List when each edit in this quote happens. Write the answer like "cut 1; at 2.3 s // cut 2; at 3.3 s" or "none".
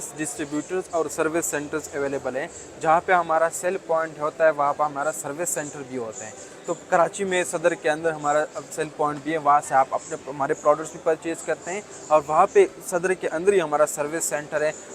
none